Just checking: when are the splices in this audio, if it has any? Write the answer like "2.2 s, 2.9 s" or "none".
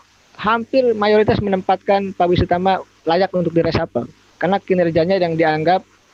none